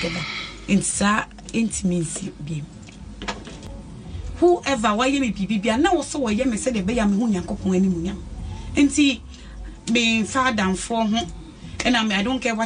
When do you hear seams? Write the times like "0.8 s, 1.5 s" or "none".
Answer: 3.6 s